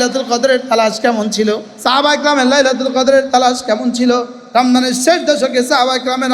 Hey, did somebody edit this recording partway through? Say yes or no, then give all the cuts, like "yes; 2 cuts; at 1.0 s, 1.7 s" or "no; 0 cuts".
yes; 2 cuts; at 1.7 s, 4.4 s